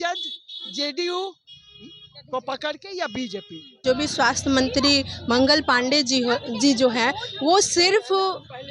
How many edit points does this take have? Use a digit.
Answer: 1